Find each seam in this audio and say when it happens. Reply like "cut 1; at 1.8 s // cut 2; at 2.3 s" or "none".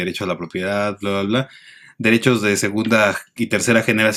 none